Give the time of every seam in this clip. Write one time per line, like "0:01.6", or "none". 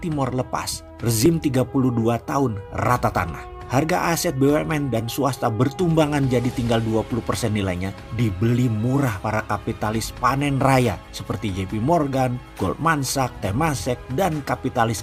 none